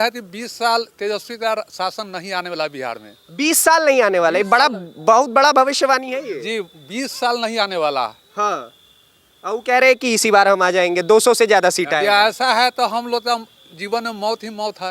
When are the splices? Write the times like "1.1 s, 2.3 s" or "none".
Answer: none